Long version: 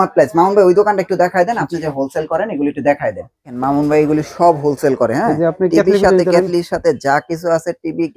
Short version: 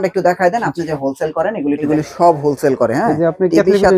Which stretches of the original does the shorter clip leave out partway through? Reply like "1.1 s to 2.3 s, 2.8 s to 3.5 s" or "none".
2.8 s to 4.1 s